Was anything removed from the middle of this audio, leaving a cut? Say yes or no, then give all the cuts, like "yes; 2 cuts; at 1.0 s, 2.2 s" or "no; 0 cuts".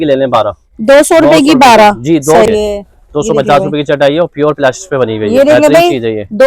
yes; 1 cut; at 2.5 s